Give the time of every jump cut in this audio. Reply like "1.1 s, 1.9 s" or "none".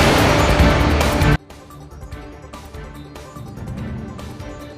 none